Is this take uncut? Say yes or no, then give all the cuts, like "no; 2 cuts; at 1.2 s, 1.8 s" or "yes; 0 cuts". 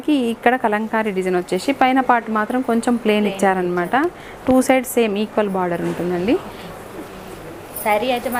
yes; 0 cuts